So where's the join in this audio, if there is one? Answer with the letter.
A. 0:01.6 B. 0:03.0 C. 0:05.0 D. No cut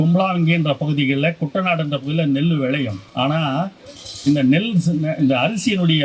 B